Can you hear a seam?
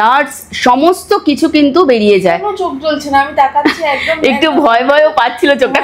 no; 0 cuts

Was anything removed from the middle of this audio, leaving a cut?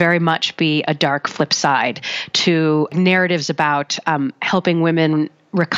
yes; 1 cut; at 2.9 s

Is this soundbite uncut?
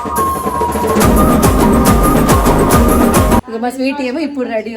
no; 1 cut; at 3.5 s

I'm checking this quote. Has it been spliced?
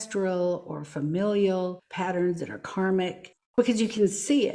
yes; 2 cuts; at 1.9 s, 3.4 s

